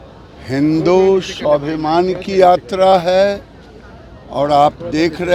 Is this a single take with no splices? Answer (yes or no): yes